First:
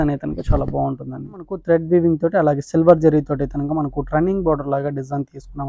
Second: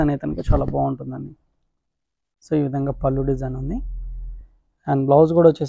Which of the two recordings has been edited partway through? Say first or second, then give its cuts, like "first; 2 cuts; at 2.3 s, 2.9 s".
first; 1 cut; at 1.6 s